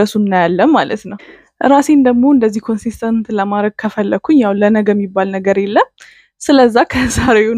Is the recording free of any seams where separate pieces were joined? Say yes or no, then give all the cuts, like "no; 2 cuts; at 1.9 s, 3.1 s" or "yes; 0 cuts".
no; 1 cut; at 1.1 s